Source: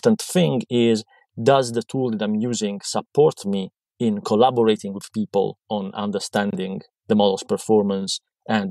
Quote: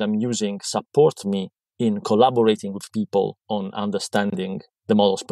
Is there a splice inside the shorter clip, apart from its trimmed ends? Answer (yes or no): no